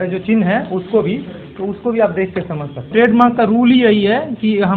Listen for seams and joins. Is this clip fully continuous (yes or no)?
no